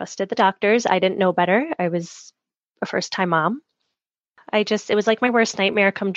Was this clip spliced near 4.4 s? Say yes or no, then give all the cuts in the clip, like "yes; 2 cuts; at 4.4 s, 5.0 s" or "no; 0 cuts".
yes; 1 cut; at 4.4 s